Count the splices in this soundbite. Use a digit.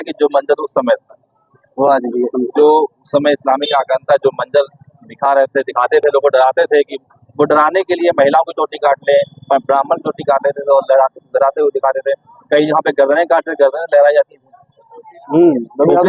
0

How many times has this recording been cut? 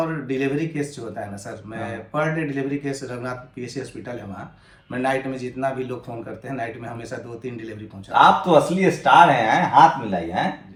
0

